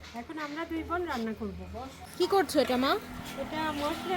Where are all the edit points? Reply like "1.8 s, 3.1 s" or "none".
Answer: 2.0 s

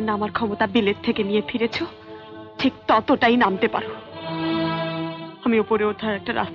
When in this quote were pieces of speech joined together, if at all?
none

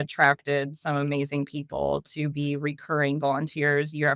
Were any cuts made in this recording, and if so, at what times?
none

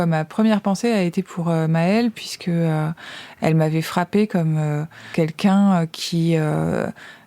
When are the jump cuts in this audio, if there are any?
3.2 s, 5.1 s

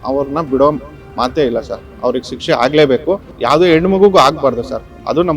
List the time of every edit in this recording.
3.3 s

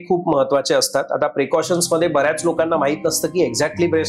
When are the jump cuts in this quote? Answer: none

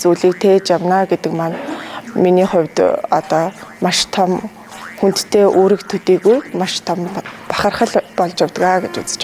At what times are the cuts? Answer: 8.1 s

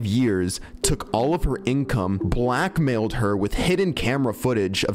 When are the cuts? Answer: 2.2 s

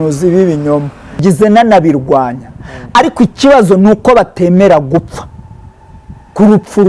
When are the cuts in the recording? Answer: 1.2 s

